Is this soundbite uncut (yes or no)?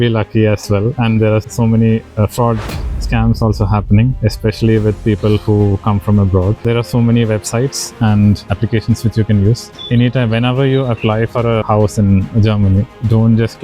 no